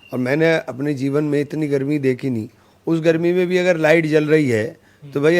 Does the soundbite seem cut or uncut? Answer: uncut